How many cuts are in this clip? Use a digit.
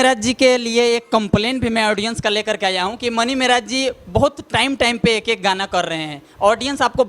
0